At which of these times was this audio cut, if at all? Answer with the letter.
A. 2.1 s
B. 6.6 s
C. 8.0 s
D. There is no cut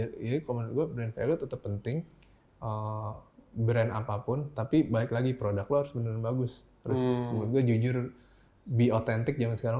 D